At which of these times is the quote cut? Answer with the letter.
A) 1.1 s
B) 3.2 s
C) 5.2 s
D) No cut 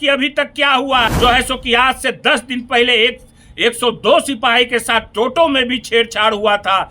A